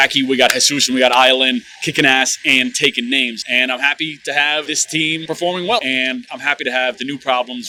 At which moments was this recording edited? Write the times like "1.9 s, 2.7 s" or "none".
none

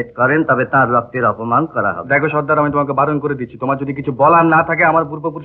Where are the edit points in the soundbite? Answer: none

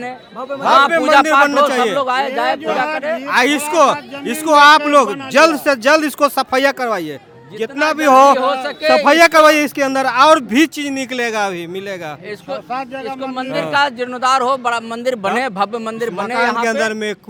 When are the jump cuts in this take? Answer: none

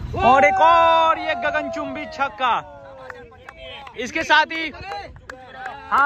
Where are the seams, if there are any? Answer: none

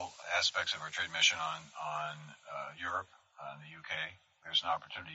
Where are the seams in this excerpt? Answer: none

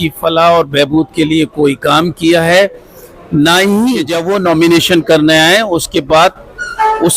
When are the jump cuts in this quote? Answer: 4.1 s

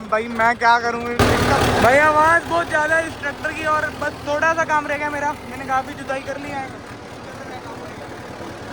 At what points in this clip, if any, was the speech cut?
1.1 s

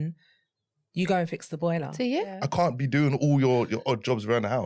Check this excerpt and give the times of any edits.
2.4 s

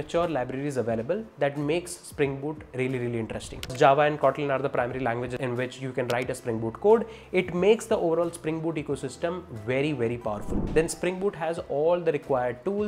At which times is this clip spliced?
3.7 s, 5.4 s, 10.5 s

